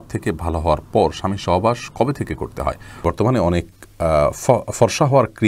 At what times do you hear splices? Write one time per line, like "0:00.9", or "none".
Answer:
0:03.0